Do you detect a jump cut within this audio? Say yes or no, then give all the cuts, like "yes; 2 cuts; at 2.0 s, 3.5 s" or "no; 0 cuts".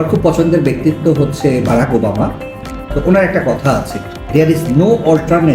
no; 0 cuts